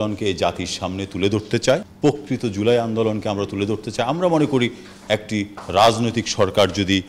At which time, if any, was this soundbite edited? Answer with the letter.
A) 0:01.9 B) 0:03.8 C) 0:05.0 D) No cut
A